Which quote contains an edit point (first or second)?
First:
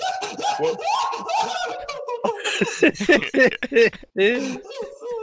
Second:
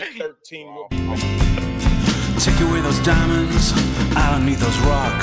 second